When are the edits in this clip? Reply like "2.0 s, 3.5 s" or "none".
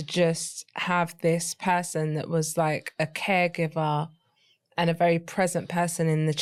none